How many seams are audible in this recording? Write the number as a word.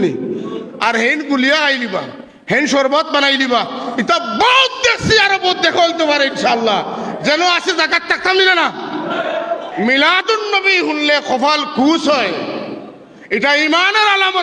one